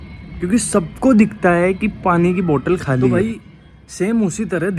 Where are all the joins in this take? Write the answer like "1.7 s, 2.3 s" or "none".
3.1 s